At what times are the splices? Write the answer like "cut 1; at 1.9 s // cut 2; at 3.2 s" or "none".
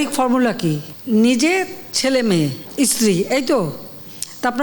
cut 1; at 0.9 s // cut 2; at 2.6 s